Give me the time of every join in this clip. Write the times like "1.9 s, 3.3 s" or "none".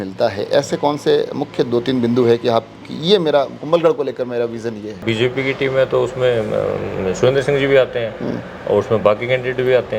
5.0 s